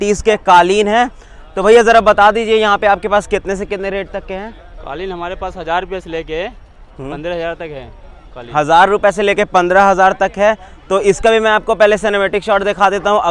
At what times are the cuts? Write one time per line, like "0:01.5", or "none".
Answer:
none